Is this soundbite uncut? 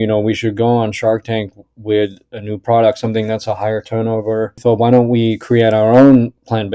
no; 1 cut; at 4.6 s

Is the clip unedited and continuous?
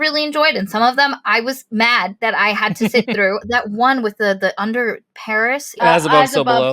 no; 3 cuts; at 2.1 s, 3.5 s, 5.8 s

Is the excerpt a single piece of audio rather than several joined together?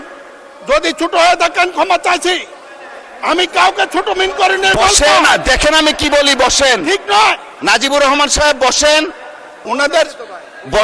yes; 0 cuts

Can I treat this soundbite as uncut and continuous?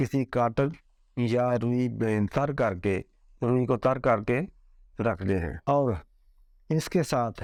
yes; 0 cuts

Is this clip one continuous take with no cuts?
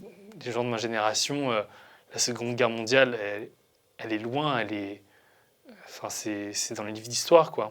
yes; 0 cuts

